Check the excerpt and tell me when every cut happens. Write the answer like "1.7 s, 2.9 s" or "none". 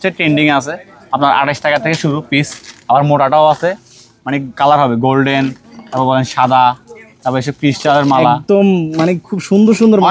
none